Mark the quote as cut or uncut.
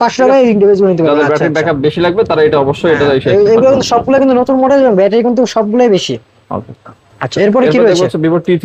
uncut